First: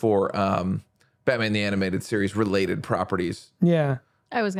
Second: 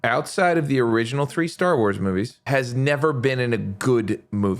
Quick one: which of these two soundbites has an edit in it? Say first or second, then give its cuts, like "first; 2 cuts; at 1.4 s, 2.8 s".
second; 1 cut; at 2.4 s